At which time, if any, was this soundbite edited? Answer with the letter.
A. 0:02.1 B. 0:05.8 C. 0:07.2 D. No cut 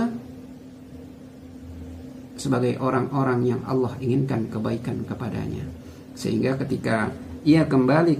D